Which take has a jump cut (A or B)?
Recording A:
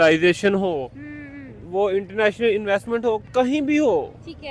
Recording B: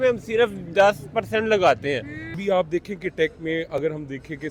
B